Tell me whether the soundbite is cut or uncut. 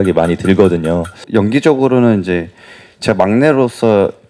cut